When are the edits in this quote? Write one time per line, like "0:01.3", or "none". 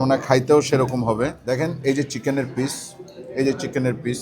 0:01.4